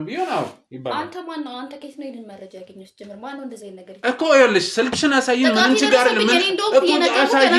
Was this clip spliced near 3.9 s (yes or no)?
yes